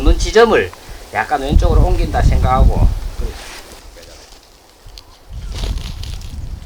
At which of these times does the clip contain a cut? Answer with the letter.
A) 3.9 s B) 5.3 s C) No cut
A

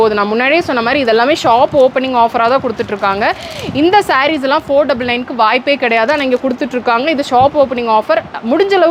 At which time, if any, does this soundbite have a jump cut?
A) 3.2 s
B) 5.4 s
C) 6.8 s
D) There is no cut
D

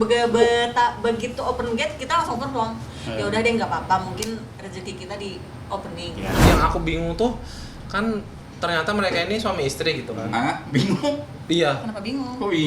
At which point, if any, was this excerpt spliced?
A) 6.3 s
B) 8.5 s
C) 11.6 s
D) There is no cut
A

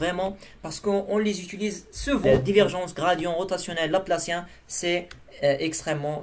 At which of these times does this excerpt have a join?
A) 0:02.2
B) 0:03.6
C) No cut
A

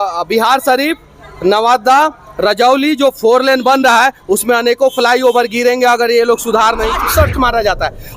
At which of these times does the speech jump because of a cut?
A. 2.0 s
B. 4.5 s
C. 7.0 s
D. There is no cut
C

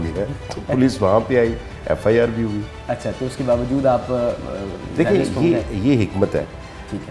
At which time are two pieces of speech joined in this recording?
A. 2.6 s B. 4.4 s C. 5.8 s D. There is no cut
D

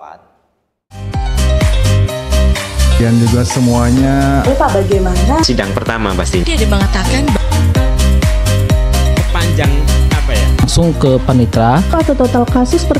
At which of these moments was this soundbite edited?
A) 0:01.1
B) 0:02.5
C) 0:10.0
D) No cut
A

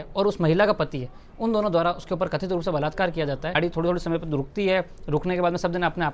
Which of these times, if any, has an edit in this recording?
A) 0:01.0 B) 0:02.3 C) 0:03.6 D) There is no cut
C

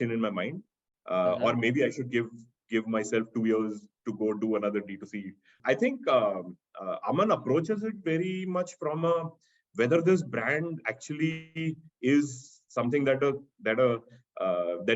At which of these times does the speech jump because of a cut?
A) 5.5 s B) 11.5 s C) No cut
A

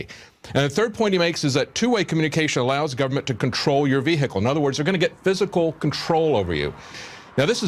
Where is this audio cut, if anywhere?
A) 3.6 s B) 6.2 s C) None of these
A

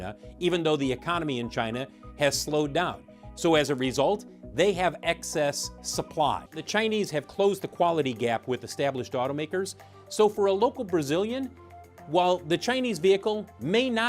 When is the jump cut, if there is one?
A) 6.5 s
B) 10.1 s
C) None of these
A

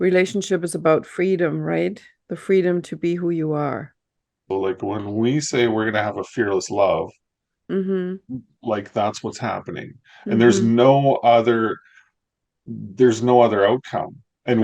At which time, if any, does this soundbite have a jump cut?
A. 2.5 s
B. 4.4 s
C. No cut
B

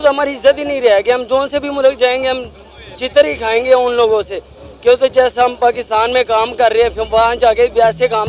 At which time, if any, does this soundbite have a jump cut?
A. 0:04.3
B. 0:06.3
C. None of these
C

